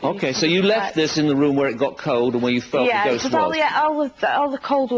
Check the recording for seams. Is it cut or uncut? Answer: cut